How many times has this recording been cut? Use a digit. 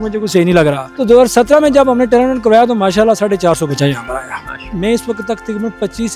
2